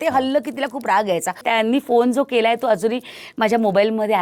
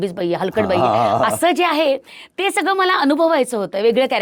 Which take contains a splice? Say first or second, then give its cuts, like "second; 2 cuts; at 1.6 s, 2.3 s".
first; 1 cut; at 1.4 s